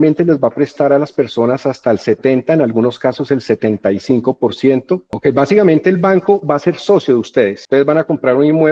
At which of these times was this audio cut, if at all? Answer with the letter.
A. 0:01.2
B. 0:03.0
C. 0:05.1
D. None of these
C